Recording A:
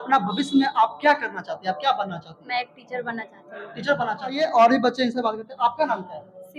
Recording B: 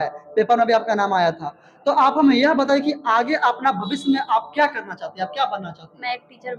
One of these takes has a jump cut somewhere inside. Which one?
A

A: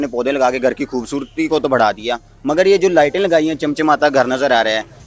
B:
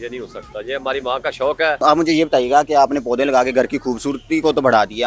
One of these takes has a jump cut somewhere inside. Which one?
B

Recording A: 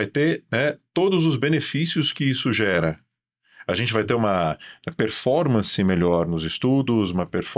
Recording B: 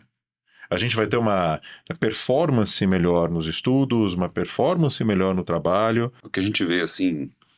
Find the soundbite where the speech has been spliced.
B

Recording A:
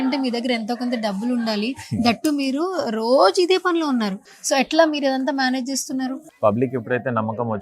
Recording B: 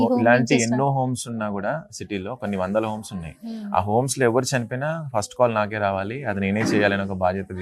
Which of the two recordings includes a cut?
A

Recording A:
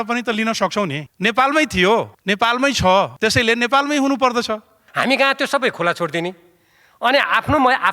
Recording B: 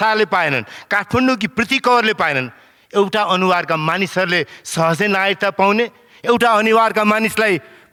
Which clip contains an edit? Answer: A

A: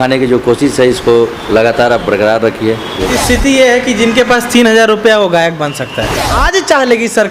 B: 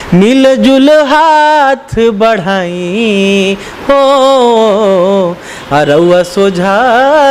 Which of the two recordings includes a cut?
A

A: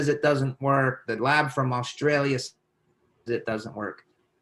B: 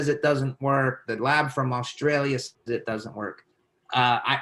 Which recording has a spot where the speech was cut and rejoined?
B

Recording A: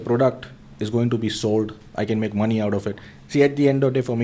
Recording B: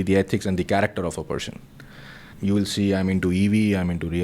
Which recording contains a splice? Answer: B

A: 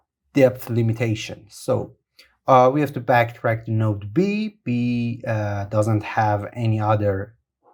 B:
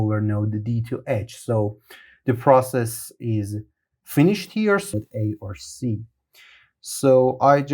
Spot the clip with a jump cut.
B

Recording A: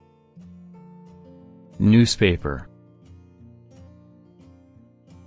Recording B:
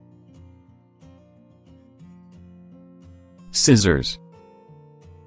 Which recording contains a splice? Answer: A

